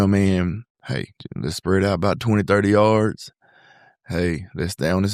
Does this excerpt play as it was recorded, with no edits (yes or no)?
yes